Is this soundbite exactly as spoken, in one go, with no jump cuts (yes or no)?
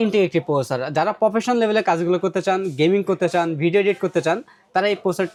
yes